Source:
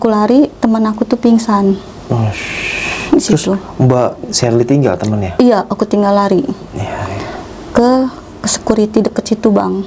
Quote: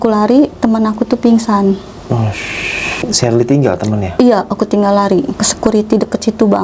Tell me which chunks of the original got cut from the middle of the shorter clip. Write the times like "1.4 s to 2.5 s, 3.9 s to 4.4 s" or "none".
3.0 s to 4.2 s, 6.6 s to 8.4 s